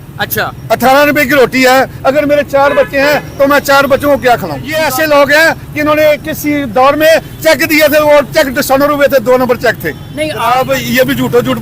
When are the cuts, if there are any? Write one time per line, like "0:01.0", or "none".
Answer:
0:04.7
0:10.4